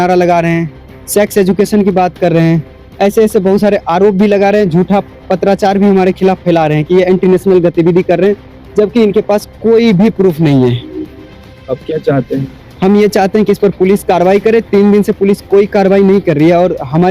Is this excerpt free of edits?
yes; 0 cuts

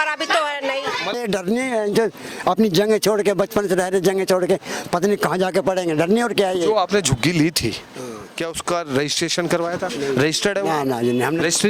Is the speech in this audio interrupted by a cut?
yes; 1 cut; at 1.2 s

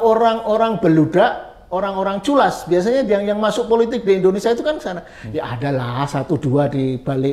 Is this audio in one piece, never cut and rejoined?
yes; 0 cuts

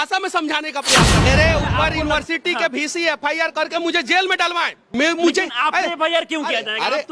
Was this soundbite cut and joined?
yes; 2 cuts; at 1.3 s, 4.8 s

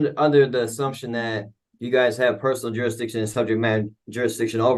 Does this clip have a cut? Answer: no; 0 cuts

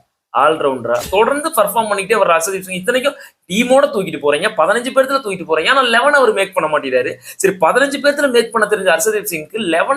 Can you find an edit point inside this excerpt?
yes; 1 cut; at 1.0 s

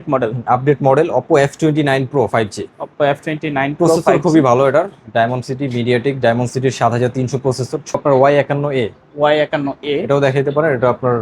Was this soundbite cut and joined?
yes; 1 cut; at 8.0 s

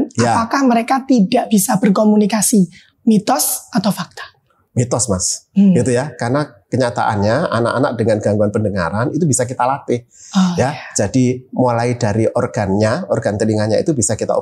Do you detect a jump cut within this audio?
no; 0 cuts

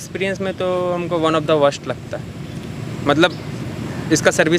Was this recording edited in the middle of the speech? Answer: no; 0 cuts

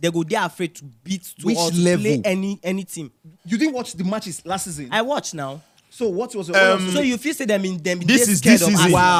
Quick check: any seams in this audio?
no; 0 cuts

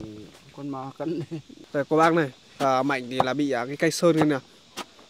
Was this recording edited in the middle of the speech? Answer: yes; 1 cut; at 1.5 s

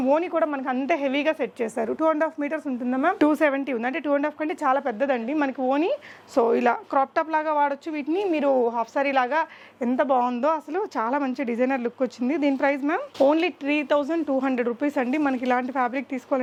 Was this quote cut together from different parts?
no; 0 cuts

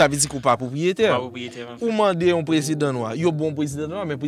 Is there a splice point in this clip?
no; 0 cuts

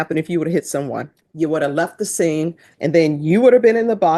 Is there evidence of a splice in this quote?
yes; 2 cuts; at 1.2 s, 2.7 s

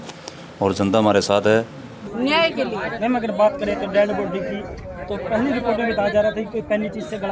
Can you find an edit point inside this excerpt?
yes; 1 cut; at 1.9 s

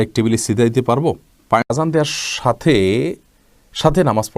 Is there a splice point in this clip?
yes; 1 cut; at 1.7 s

